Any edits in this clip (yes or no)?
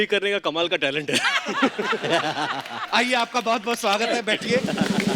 no